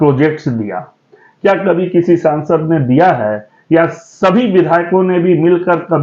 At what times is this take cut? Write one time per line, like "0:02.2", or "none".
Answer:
none

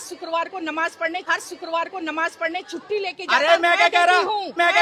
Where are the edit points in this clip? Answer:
none

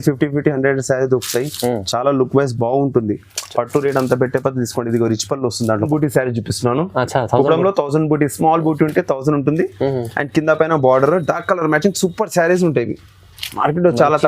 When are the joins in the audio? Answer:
0:05.9

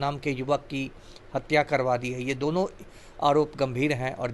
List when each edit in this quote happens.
none

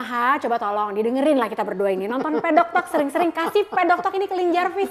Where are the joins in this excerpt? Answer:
none

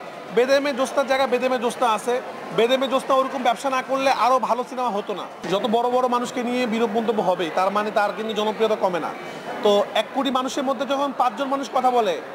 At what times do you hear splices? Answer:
0:05.3

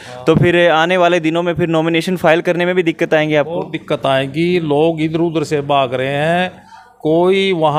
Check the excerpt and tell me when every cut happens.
none

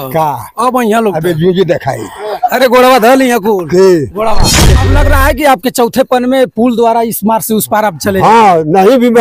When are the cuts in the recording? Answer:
0:04.7

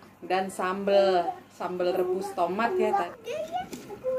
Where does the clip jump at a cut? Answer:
0:03.1

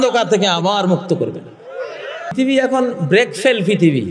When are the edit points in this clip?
0:02.3

